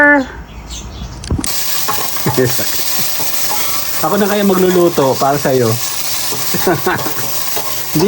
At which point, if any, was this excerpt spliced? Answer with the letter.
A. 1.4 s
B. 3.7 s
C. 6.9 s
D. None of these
A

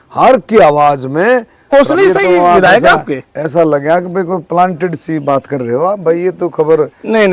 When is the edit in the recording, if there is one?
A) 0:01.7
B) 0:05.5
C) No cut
A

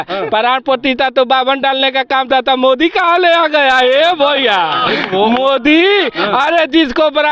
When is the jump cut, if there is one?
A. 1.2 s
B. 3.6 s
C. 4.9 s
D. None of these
D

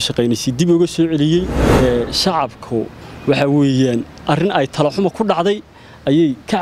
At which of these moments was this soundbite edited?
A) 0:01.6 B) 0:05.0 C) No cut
A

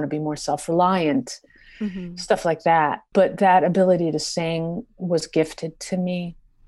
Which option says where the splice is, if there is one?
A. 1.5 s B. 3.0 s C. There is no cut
B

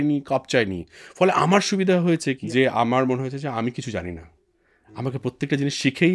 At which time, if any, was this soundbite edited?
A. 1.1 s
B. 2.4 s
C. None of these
B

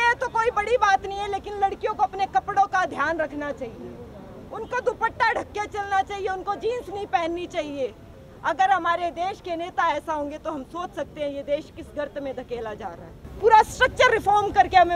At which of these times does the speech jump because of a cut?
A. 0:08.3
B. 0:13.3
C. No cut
B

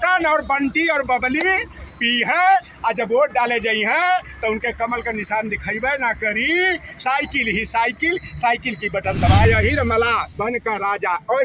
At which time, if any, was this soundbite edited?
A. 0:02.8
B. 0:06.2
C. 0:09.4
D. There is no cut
C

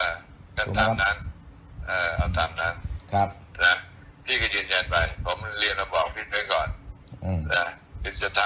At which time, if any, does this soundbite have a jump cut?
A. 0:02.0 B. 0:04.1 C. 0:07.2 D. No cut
D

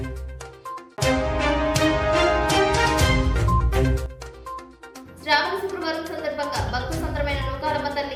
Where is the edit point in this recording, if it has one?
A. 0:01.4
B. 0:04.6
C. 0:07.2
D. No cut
D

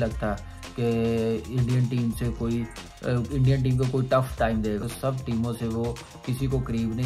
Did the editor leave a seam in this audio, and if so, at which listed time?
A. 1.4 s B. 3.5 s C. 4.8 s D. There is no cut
C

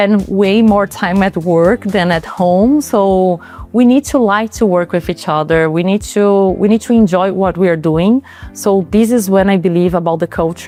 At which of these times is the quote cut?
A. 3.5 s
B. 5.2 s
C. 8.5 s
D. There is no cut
D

